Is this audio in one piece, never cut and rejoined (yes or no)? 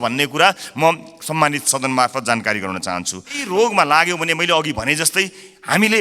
no